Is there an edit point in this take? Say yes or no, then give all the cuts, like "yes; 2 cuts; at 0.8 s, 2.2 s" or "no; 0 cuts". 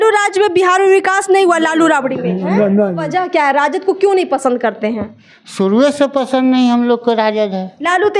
yes; 1 cut; at 3.0 s